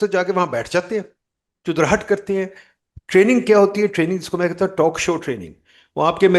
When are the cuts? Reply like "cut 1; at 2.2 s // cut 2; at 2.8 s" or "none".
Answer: none